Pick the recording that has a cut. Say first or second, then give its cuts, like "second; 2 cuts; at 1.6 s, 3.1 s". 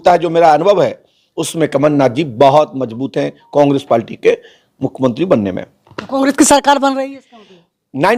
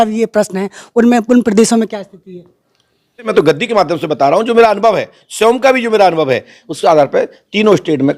second; 1 cut; at 3.3 s